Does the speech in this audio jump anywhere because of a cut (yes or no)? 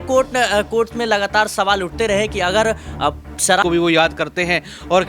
yes